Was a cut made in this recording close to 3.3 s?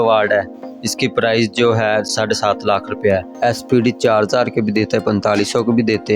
yes; 1 cut; at 3.3 s

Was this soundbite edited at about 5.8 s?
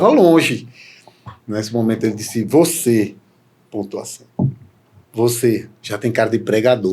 yes; 1 cut; at 5.8 s

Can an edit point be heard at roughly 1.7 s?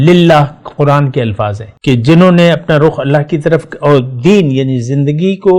yes; 1 cut; at 1.7 s

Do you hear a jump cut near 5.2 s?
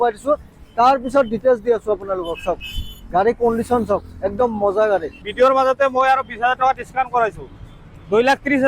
yes; 1 cut; at 5.2 s

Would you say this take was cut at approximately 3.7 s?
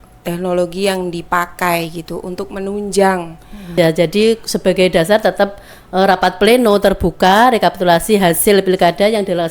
yes; 1 cut; at 3.7 s

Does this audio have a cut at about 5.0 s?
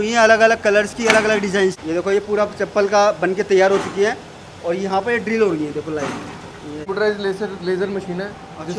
no; 2 cuts; at 1.8 s, 6.9 s

